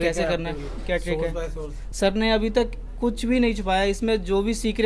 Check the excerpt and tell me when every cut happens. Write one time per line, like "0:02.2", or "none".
none